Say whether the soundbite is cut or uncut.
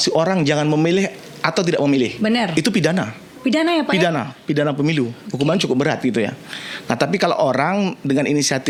uncut